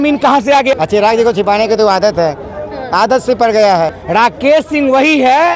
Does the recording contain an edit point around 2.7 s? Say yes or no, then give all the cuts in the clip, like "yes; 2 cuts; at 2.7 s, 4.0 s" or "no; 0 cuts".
no; 2 cuts; at 0.8 s, 4.0 s